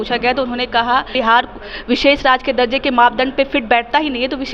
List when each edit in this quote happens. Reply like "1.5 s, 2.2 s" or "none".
1.1 s